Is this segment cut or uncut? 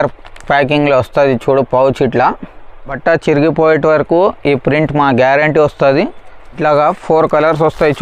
cut